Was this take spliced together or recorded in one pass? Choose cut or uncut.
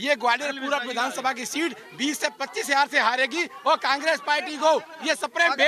uncut